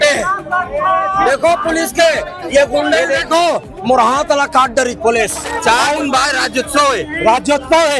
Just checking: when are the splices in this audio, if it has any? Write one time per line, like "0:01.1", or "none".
0:05.5